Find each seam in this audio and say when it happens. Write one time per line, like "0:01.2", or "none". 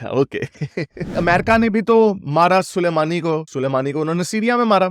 0:01.1